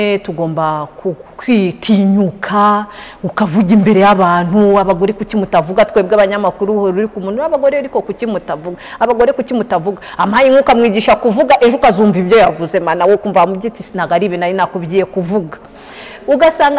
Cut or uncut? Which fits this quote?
uncut